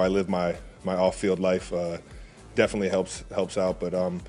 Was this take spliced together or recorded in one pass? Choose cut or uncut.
uncut